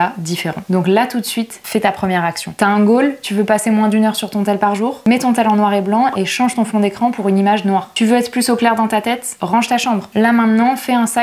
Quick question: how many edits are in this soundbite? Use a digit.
0